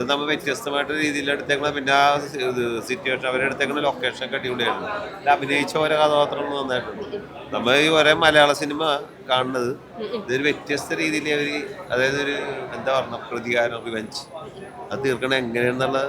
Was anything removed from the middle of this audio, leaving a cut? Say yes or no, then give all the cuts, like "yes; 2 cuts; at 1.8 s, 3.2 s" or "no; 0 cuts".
no; 0 cuts